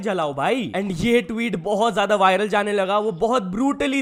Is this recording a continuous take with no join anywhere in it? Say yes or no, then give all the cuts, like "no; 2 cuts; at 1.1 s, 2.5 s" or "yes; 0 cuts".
yes; 0 cuts